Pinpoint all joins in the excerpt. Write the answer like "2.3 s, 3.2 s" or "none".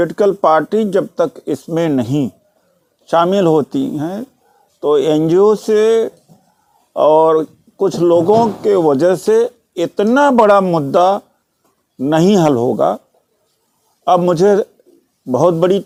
none